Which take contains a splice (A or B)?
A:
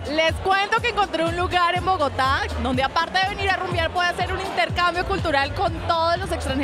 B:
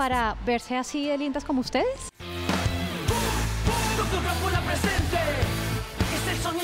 B